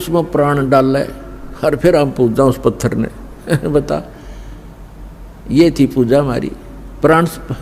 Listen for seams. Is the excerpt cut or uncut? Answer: uncut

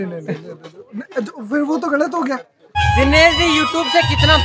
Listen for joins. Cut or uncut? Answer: cut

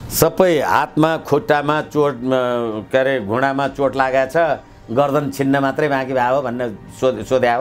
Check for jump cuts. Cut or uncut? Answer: uncut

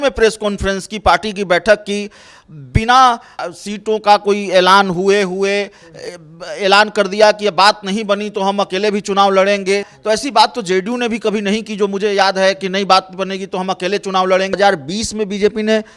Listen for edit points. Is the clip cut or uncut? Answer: cut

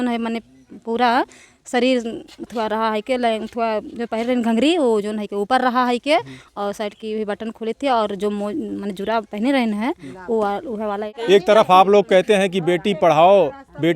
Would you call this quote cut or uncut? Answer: cut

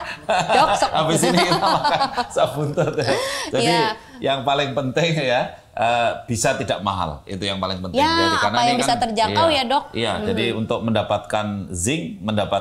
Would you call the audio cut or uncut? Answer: uncut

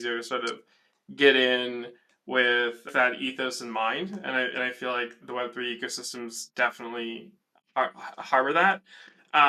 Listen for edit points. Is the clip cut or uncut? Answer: uncut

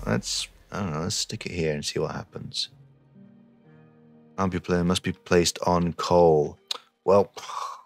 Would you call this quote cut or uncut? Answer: cut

